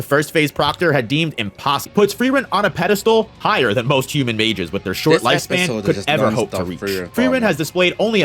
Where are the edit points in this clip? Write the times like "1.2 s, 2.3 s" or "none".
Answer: 1.9 s